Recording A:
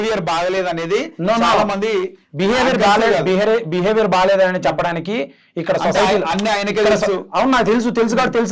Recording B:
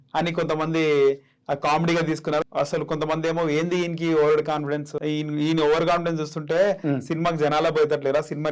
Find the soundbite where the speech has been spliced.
B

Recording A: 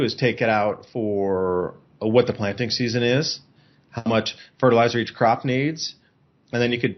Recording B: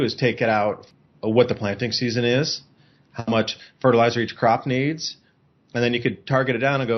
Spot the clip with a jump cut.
B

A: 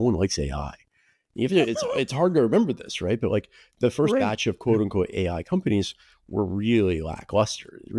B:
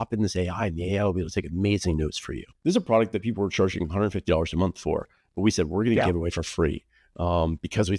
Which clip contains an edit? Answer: B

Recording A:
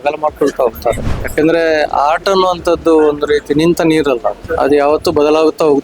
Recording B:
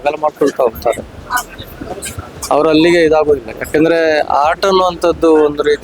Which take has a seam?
A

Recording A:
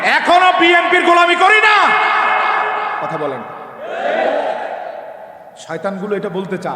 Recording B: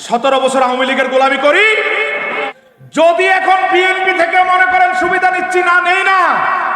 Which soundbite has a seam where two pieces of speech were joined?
B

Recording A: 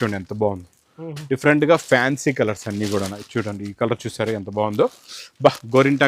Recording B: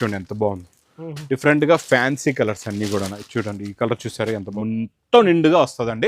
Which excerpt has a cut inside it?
B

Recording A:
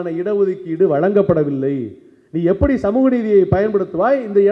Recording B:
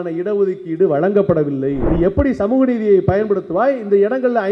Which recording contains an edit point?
B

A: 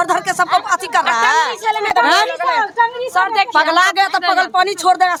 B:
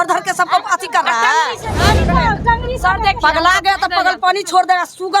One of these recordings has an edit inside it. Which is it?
B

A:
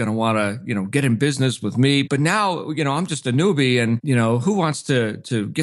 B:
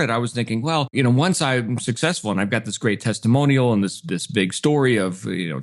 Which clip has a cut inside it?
B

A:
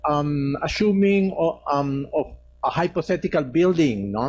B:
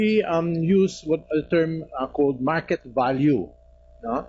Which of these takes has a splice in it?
B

